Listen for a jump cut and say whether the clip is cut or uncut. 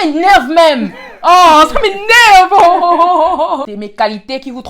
cut